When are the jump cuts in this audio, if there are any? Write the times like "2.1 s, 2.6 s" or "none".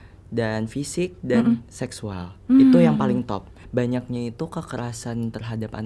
3.5 s